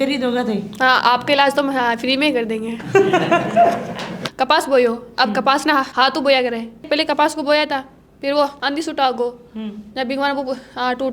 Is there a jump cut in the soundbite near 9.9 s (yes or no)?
no